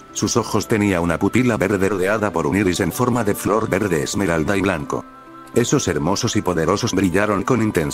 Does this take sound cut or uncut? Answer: cut